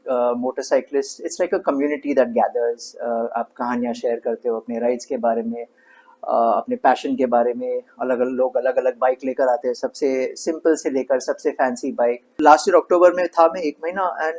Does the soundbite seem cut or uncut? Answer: cut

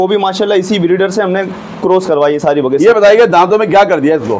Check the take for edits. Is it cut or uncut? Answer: uncut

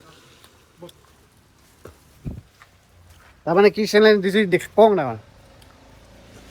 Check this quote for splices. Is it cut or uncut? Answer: uncut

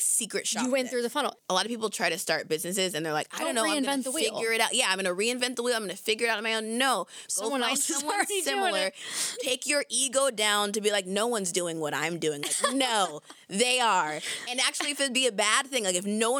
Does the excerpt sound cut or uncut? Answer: cut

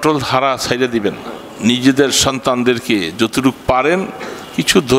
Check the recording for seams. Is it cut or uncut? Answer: cut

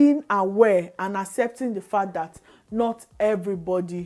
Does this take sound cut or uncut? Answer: uncut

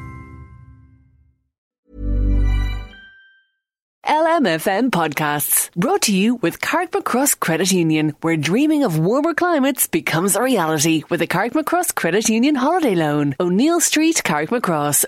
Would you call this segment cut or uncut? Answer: cut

